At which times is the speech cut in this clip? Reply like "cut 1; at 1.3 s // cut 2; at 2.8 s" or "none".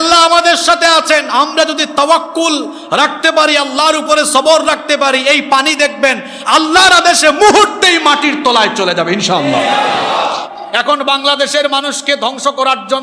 cut 1; at 10.4 s